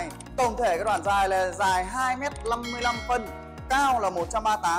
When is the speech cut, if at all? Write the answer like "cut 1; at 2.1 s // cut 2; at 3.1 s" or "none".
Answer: none